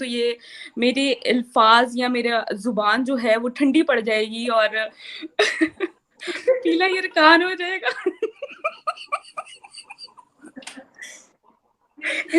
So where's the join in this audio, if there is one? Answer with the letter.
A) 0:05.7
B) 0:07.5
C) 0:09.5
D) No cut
D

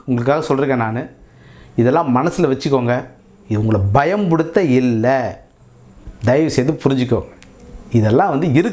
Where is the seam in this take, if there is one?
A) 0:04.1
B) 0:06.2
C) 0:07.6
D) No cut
D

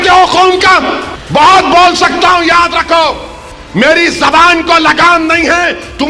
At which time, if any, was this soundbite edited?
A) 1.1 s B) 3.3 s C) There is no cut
A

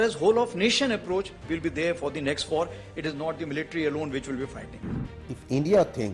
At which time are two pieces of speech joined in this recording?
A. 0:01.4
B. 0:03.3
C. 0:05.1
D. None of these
C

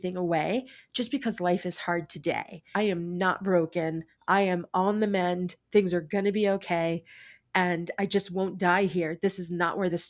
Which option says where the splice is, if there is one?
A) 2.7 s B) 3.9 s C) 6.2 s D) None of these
A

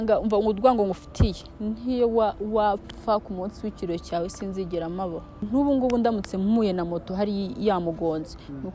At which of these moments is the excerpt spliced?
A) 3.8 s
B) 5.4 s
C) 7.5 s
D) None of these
B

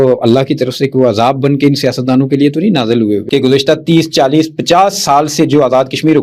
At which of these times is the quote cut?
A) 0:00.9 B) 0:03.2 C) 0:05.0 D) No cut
B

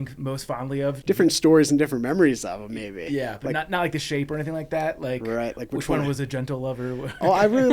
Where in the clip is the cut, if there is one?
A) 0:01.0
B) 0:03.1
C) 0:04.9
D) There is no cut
A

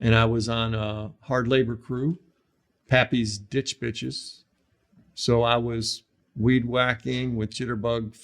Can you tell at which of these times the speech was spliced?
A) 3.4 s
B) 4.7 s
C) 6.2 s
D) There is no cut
D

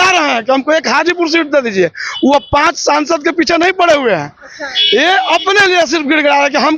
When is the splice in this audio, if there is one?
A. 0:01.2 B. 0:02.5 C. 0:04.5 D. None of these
D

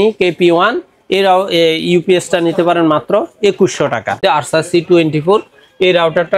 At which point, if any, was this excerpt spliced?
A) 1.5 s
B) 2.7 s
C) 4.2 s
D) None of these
C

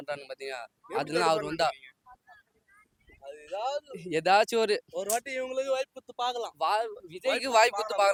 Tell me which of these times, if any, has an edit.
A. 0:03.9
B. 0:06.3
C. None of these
C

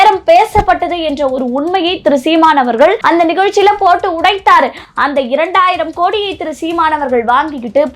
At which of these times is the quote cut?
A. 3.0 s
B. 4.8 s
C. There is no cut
A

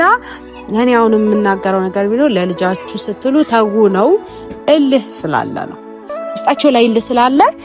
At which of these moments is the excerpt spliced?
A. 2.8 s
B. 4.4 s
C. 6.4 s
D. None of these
B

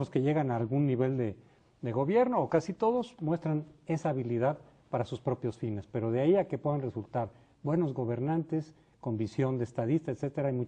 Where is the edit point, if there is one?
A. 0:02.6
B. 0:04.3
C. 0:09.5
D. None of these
C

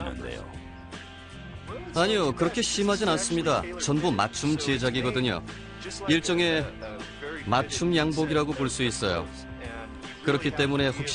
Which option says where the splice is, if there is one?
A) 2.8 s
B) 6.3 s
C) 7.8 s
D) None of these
A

